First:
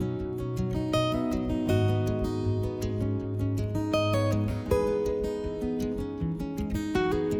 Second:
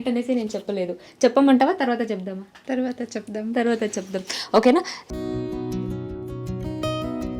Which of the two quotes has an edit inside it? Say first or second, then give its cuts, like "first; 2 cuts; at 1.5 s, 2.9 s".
second; 1 cut; at 5.0 s